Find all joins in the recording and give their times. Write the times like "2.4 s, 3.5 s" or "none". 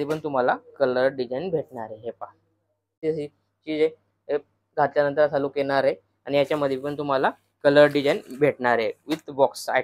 3.0 s

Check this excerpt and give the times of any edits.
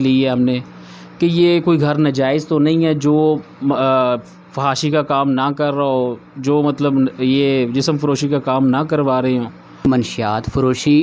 9.9 s

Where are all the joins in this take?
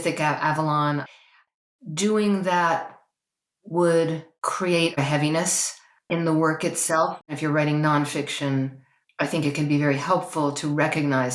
1.4 s, 4.8 s, 7.2 s

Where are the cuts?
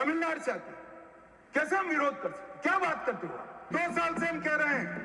3.7 s

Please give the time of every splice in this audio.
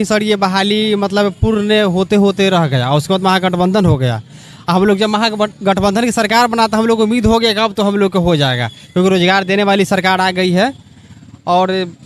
none

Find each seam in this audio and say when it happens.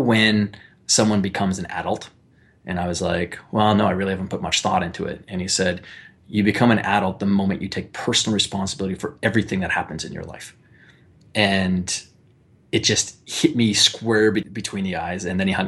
14.5 s

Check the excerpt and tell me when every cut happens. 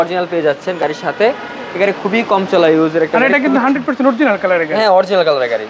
none

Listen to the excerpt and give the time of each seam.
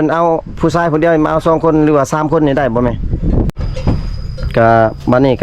3.5 s

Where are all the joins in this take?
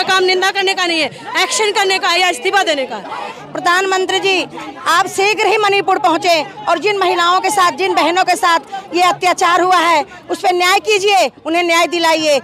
3.4 s

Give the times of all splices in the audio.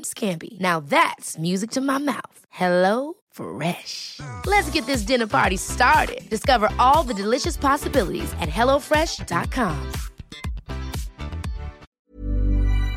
11.9 s

